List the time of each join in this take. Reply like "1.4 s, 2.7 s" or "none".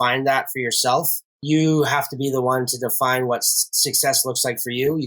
1.3 s